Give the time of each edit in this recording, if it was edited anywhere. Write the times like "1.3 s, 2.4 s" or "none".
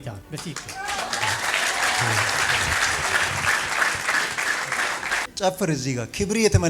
5.2 s